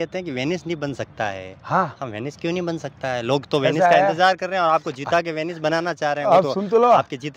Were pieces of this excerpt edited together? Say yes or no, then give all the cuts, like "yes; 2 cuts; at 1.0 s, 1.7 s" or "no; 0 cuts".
no; 0 cuts